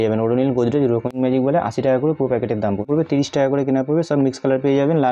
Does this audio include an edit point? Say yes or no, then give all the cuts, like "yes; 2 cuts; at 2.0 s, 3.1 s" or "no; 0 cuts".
yes; 2 cuts; at 1.1 s, 2.9 s